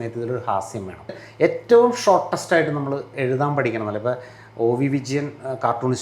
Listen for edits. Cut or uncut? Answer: cut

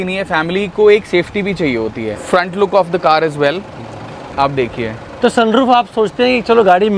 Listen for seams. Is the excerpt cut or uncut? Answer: cut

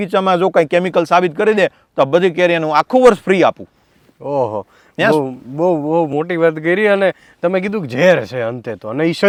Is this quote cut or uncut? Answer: uncut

